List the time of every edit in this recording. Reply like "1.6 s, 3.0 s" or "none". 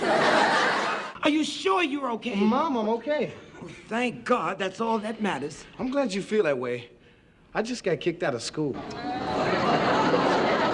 1.0 s